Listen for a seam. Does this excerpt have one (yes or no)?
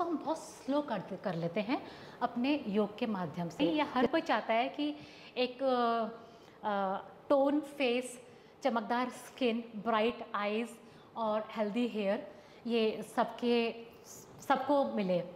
yes